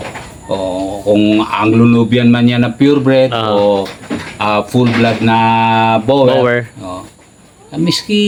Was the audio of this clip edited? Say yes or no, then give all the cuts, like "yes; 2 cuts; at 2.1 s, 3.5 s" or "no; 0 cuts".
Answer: no; 0 cuts